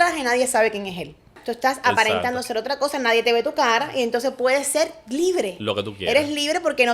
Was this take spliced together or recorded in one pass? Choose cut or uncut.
cut